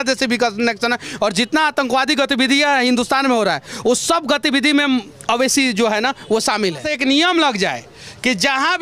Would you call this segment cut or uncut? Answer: cut